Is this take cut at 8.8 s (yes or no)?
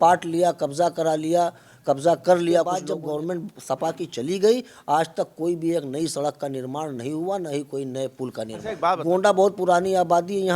yes